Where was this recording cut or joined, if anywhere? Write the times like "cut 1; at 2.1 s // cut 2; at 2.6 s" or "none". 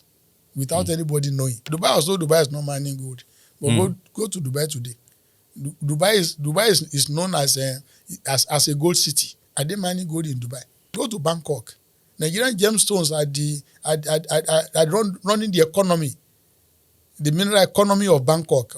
cut 1; at 1.7 s // cut 2; at 10.9 s